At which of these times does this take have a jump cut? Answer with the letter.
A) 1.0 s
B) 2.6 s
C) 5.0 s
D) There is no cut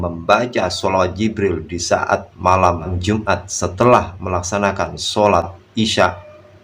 D